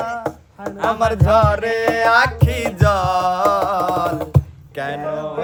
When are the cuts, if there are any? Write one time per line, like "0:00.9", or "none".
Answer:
none